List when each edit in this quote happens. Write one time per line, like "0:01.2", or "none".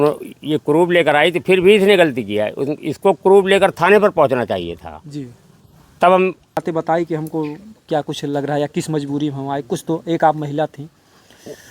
0:06.6